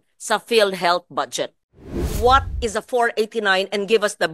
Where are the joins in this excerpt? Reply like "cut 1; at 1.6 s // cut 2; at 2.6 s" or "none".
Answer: cut 1; at 1.7 s